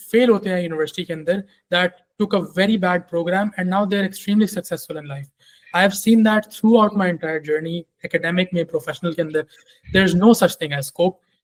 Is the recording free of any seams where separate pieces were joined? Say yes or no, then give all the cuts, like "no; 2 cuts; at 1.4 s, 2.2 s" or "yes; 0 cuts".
yes; 0 cuts